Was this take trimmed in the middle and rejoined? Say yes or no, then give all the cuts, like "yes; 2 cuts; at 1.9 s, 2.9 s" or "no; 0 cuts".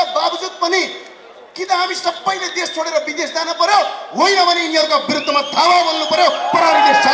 no; 0 cuts